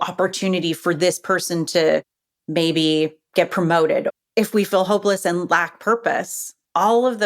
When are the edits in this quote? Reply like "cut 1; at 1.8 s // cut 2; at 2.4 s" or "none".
cut 1; at 4.1 s